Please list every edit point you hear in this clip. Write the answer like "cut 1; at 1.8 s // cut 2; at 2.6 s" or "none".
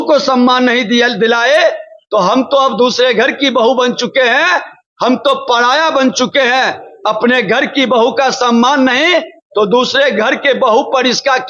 none